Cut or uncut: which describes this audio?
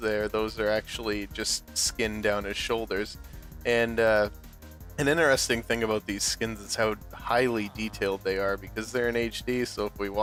uncut